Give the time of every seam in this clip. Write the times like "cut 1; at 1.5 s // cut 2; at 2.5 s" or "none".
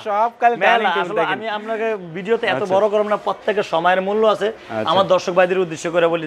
none